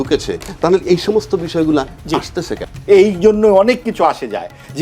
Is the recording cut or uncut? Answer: cut